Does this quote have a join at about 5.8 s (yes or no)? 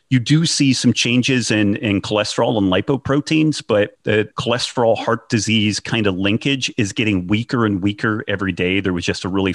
no